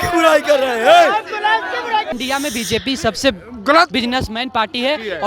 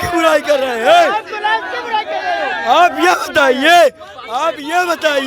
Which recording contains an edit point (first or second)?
first